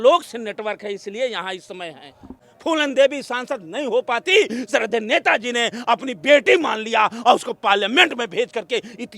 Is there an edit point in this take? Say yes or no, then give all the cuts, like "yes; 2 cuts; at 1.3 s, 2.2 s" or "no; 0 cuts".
yes; 1 cut; at 2.4 s